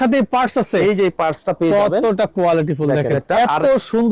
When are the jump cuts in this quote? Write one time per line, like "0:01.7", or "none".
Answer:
0:03.2